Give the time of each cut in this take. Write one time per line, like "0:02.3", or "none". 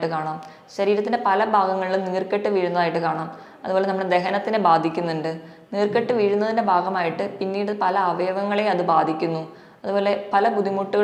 none

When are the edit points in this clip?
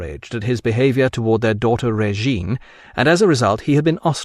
none

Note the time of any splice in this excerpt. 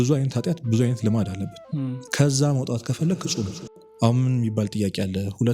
0:03.9

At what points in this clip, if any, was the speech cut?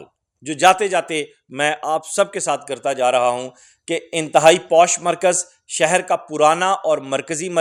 none

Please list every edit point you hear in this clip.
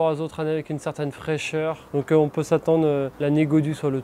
0:01.8
0:03.1

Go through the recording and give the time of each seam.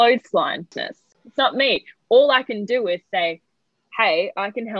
0:00.9

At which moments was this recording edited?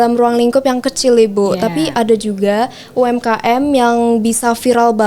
none

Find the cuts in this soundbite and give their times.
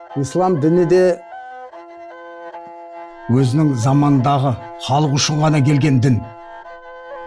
0:06.3

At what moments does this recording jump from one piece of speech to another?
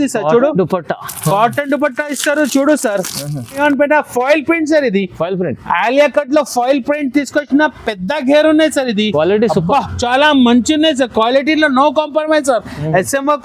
0:03.6

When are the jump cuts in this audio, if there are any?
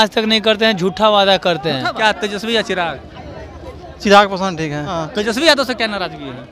0:01.9
0:05.0

